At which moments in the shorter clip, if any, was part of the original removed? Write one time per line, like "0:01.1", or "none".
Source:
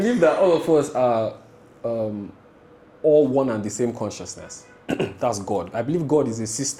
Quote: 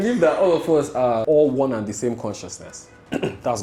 0:01.2

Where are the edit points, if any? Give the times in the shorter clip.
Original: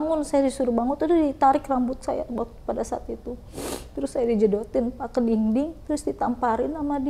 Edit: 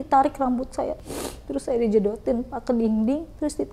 0:01.0

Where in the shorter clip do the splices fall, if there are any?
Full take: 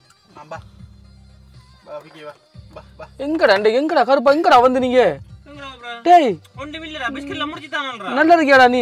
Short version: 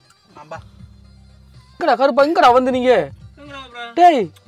0:01.8

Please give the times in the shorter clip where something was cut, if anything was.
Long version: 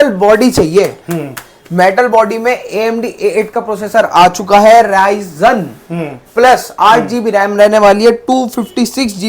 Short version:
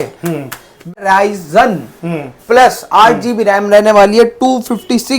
0:01.0

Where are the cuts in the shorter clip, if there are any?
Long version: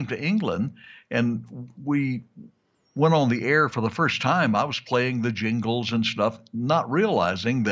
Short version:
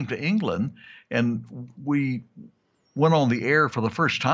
none

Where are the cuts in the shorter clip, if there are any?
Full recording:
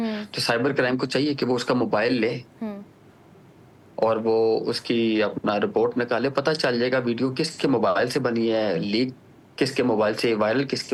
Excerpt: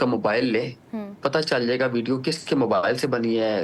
0:01.2

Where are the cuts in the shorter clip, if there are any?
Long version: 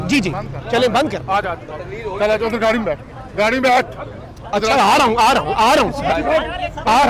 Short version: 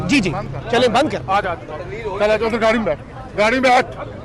none

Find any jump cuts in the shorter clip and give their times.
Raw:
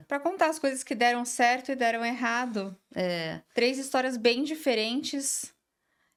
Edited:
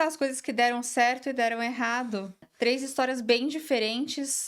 0:02.4

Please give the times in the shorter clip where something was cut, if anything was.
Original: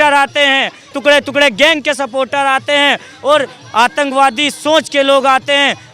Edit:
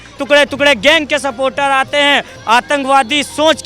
0:02.3

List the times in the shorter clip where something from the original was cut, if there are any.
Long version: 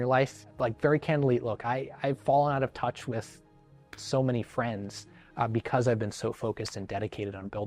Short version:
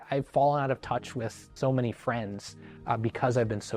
0:01.4

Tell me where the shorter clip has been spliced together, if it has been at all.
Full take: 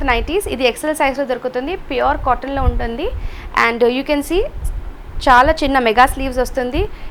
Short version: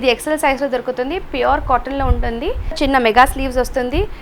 0:02.8

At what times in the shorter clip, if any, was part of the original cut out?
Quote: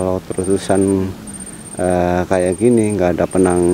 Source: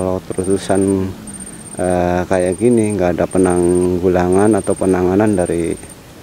none

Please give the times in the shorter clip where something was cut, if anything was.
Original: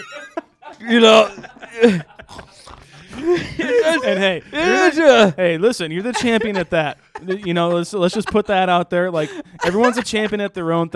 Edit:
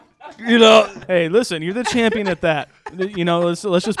0:01.1

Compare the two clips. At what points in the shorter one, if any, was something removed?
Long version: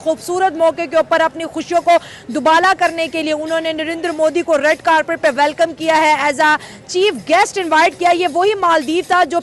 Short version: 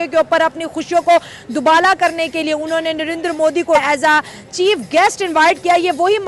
0:03.8

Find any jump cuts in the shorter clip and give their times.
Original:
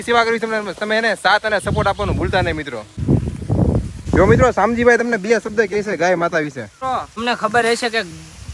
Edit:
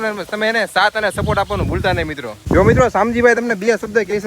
0:02.3

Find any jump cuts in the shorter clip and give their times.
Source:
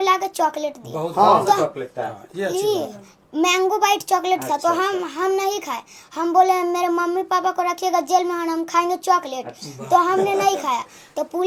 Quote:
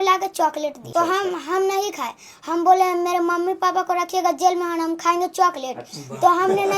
0:00.9

